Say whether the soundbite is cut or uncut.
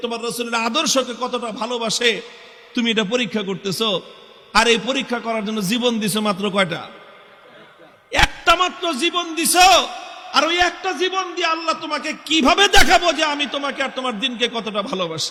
uncut